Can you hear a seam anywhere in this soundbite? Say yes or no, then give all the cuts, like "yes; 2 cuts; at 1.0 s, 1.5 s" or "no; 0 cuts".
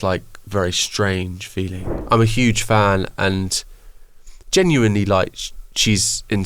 yes; 1 cut; at 1.9 s